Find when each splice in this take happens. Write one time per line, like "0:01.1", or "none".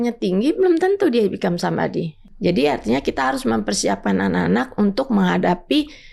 0:02.2